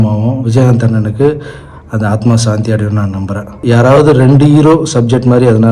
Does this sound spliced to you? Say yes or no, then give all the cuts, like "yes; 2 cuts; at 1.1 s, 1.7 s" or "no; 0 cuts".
yes; 1 cut; at 3.6 s